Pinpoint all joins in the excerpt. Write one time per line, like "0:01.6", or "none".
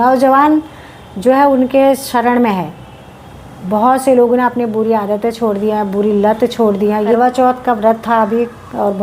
0:07.2

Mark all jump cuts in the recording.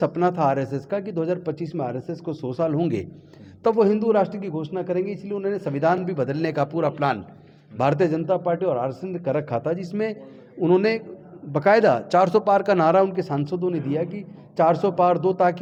none

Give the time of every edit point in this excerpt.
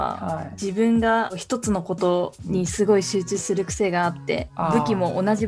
none

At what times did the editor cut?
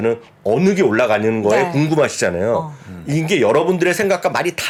none

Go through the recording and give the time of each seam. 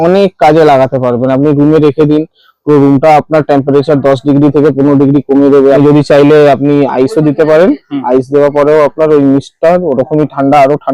0:05.8

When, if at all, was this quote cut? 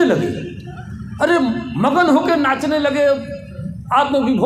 none

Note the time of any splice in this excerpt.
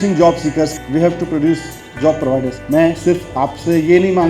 0:02.6

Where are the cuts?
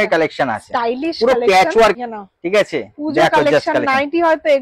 0:02.0

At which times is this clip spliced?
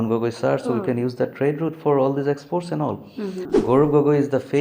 0:03.5

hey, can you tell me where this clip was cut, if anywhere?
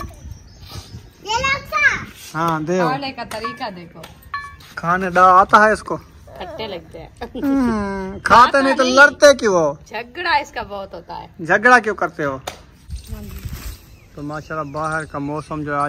0:13.0

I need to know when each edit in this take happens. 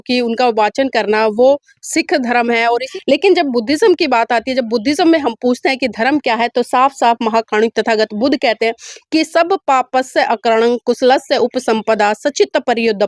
0:02.9

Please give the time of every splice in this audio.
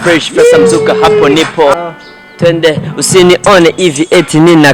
0:01.8

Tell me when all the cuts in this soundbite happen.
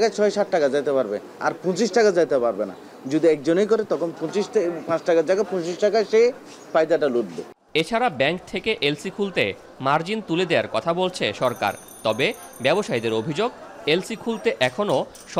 none

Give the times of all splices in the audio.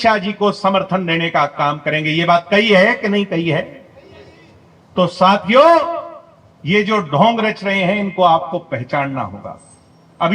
none

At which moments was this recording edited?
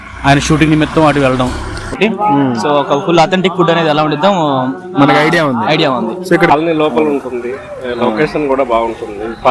0:01.9
0:06.5

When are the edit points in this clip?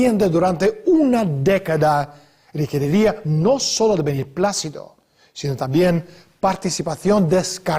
0:01.0

